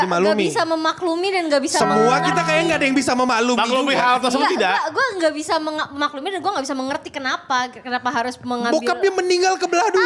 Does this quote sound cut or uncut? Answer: uncut